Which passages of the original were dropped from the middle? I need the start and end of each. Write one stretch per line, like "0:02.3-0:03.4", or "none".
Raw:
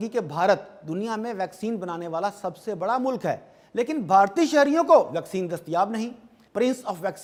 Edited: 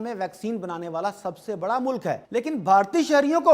0:03.4-0:03.7